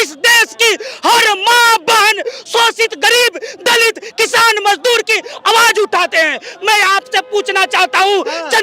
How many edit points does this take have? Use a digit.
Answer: 0